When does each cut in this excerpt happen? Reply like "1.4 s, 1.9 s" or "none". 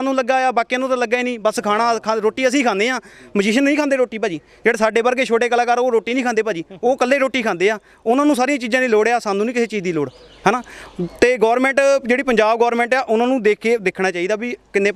none